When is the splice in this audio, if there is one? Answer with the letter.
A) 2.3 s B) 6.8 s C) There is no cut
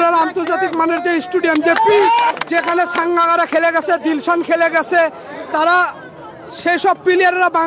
A